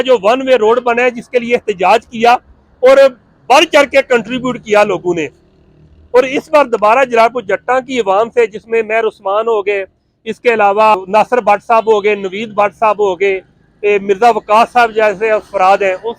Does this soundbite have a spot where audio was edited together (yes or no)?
yes